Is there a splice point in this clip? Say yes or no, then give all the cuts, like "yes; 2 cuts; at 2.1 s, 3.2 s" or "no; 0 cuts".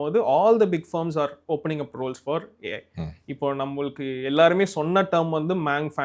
no; 0 cuts